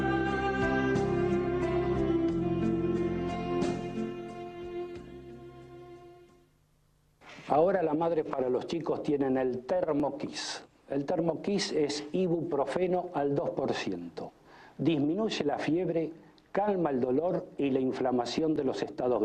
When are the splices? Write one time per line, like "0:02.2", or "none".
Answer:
0:12.1